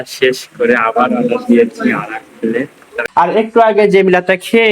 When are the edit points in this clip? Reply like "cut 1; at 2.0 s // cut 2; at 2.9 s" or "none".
cut 1; at 3.0 s